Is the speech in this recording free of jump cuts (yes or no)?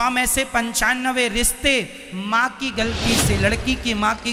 yes